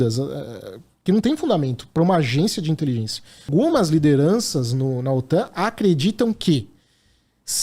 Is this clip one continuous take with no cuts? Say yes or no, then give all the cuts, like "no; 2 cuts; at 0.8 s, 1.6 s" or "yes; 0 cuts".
no; 1 cut; at 3.5 s